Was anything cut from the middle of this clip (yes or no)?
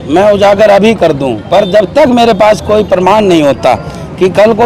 no